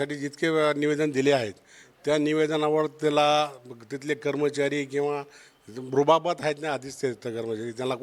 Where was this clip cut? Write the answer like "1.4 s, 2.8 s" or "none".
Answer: none